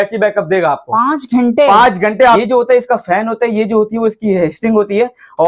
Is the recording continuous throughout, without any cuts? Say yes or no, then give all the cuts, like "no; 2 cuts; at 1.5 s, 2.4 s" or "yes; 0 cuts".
no; 1 cut; at 2.4 s